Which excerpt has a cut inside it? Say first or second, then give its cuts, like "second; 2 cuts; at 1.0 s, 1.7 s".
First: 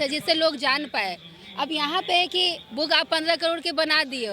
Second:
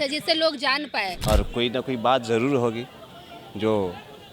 second; 1 cut; at 1.2 s